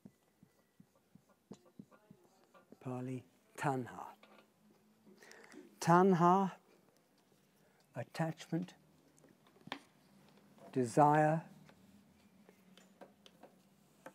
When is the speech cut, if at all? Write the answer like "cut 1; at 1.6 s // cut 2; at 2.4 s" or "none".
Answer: cut 1; at 11.1 s